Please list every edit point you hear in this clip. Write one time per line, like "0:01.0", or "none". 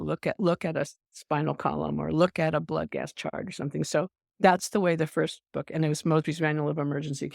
none